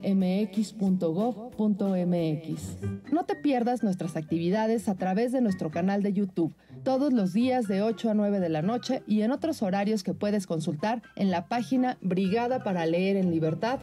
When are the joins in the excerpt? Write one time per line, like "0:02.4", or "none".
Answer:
none

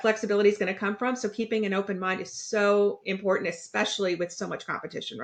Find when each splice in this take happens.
none

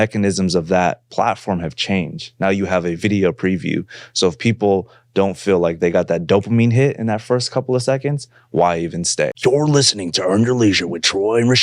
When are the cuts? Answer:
0:09.3

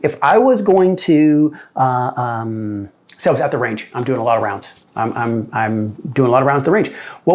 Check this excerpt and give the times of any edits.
none

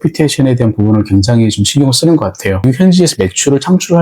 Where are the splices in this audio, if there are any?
0:02.6

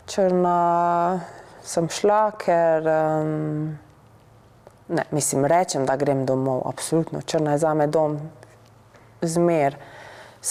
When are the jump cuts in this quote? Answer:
none

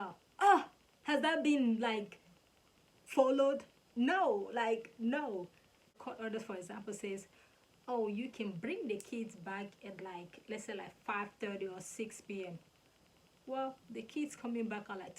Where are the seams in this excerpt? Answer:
none

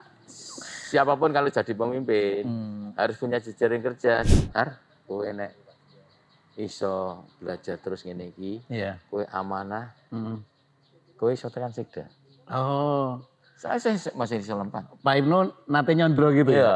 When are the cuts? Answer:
0:04.3

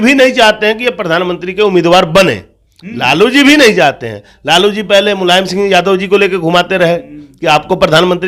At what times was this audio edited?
none

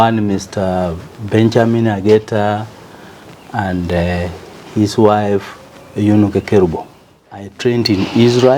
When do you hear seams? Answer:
0:07.5

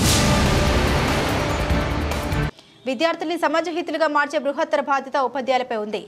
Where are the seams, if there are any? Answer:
none

